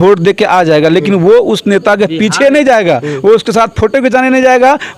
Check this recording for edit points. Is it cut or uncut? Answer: uncut